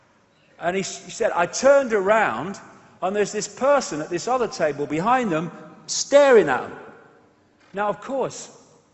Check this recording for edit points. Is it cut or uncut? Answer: uncut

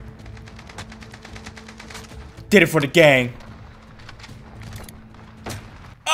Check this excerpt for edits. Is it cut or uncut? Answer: uncut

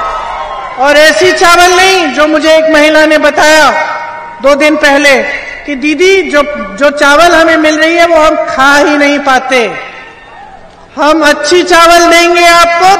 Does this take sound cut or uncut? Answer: uncut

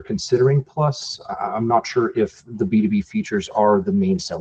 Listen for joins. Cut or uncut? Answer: uncut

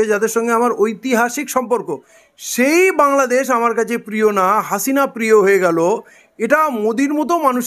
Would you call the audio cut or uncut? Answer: uncut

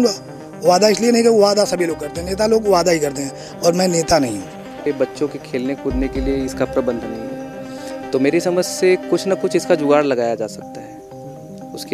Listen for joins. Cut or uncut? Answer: cut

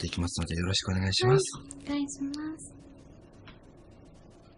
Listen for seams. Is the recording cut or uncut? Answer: uncut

